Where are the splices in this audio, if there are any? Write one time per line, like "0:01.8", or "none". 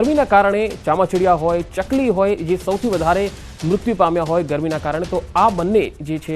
0:02.4